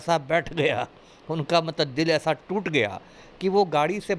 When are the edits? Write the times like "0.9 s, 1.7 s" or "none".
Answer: none